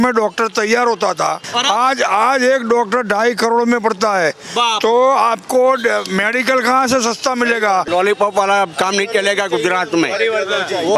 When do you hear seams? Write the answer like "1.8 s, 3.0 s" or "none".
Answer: 1.4 s, 7.9 s